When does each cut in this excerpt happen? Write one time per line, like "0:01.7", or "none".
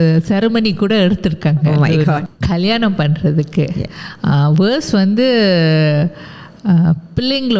0:02.3